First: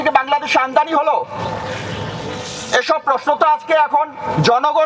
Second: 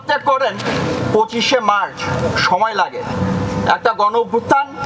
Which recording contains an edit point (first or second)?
second